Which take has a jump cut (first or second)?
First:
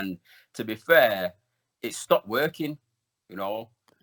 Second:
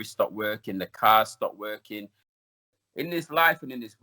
second